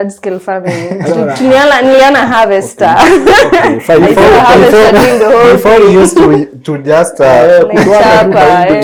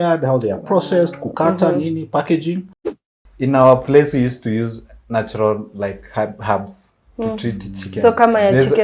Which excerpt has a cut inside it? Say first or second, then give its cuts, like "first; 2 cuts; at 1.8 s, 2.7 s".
second; 1 cut; at 2.7 s